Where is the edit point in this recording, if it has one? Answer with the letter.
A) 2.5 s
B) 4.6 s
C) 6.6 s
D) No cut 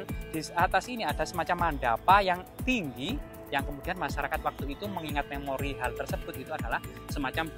D